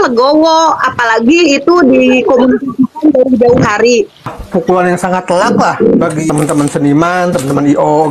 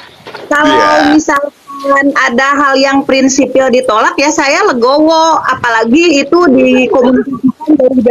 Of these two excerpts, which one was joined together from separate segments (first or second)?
first